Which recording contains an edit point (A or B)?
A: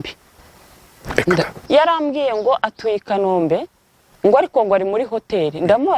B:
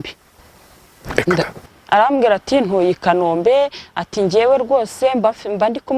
A